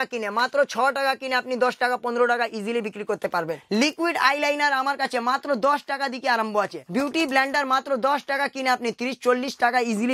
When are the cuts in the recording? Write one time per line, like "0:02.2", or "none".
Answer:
0:03.6
0:06.8